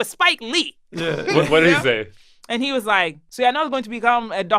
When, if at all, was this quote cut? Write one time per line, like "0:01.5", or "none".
0:03.2